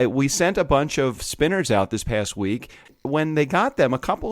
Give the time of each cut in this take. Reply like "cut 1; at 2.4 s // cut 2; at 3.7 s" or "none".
cut 1; at 1.2 s // cut 2; at 2.9 s